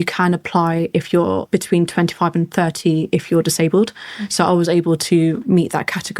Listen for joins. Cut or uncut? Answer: cut